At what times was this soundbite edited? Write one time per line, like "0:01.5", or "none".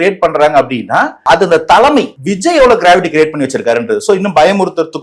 0:01.1
0:02.2